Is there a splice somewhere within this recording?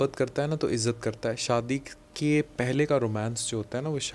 no; 0 cuts

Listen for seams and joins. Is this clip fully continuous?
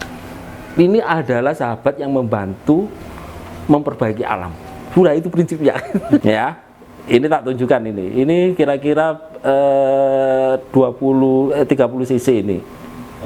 no; 1 cut; at 6.2 s

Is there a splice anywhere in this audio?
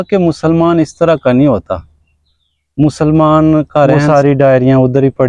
yes; 1 cut; at 4.0 s

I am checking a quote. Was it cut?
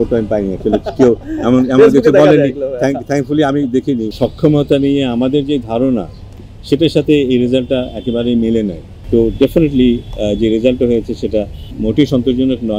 yes; 3 cuts; at 4.1 s, 8.9 s, 11.6 s

